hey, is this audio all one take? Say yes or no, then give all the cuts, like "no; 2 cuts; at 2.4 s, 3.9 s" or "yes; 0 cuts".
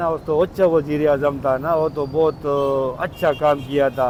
yes; 0 cuts